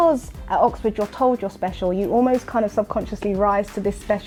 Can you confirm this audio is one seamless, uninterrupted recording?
yes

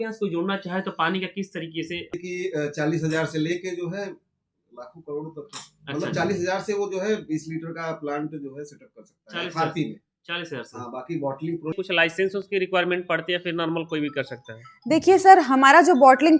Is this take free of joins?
no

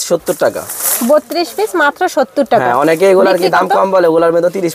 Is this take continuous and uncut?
yes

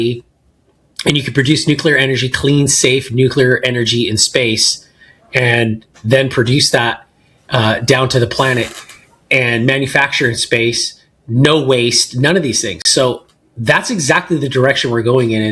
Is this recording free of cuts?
yes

